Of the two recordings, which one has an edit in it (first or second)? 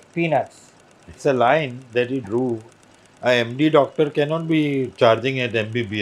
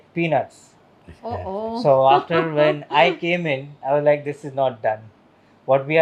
first